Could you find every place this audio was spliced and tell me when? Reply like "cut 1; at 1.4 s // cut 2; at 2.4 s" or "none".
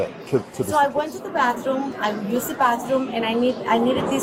none

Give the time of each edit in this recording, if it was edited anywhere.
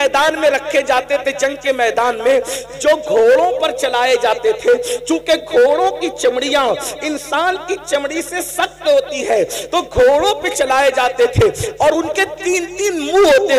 none

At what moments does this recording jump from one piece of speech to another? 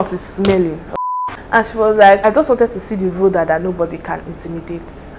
cut 1; at 0.8 s // cut 2; at 2.2 s

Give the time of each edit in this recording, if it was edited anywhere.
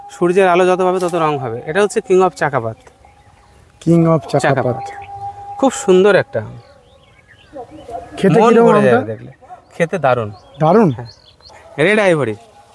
cut 1; at 11.6 s

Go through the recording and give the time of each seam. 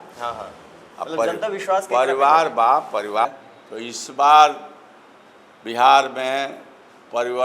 cut 1; at 3.2 s

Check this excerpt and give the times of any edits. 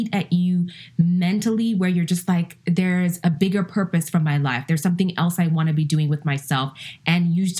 none

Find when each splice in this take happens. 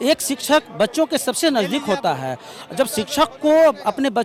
none

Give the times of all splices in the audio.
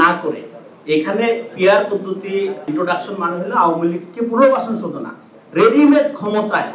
cut 1; at 2.6 s

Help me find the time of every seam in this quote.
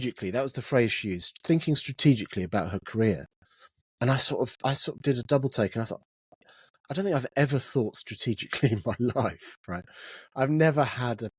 none

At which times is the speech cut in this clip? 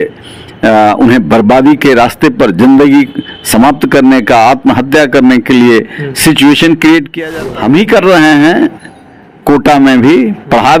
cut 1; at 7.1 s

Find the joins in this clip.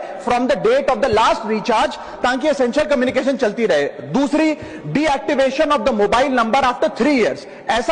cut 1; at 4.7 s

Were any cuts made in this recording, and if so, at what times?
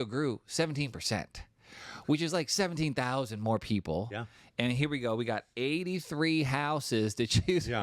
none

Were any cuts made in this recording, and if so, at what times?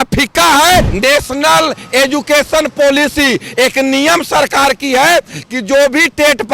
cut 1; at 0.9 s

